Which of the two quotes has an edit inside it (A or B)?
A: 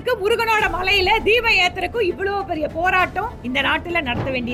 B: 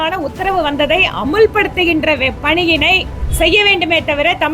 B